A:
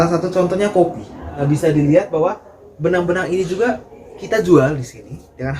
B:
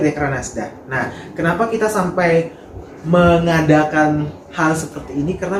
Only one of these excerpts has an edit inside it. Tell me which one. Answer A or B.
A